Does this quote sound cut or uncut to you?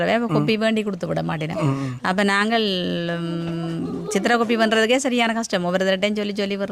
uncut